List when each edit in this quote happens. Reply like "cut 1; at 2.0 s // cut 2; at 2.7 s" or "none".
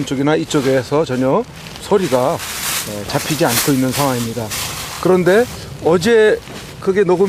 none